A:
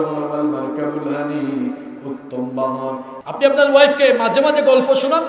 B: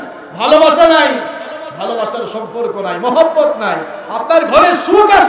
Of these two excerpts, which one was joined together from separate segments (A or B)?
A